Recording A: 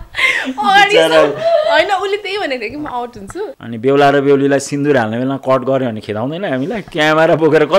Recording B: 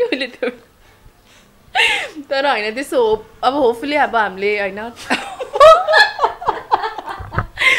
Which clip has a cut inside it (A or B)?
A